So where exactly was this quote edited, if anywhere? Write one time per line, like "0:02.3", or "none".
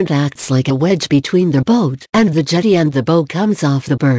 0:03.2

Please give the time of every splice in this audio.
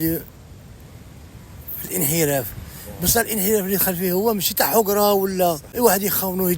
0:05.7

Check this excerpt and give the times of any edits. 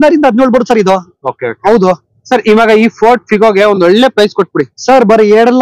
none

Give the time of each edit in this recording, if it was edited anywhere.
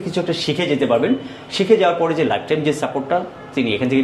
none

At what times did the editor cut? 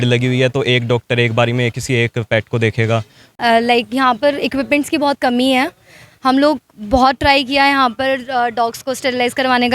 0:03.3

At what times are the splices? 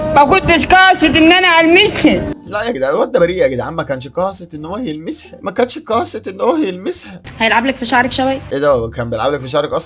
0:07.2

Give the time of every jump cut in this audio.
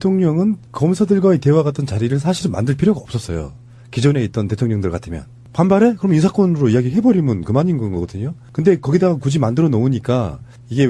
none

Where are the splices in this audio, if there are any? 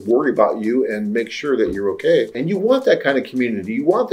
0:02.4

